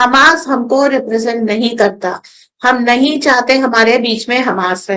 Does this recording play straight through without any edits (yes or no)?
yes